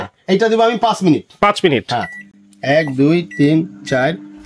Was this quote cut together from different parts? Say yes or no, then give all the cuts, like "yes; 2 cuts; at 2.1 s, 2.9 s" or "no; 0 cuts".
no; 0 cuts